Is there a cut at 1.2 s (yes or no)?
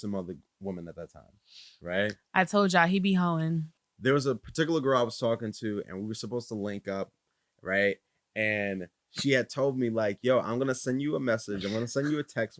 no